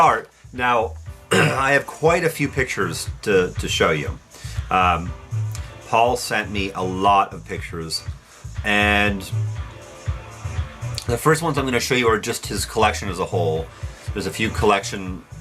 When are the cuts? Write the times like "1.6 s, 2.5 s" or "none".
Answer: 10.9 s